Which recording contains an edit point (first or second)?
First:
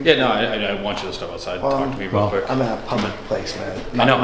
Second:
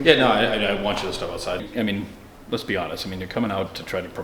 second